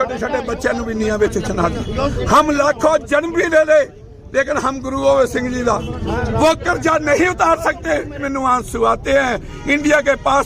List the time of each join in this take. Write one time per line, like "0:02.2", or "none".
0:08.2